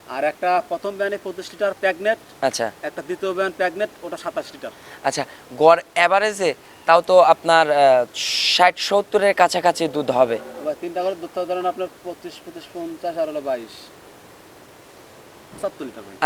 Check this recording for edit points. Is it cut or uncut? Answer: uncut